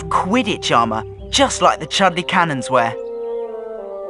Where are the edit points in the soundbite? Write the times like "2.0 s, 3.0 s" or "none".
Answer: 2.9 s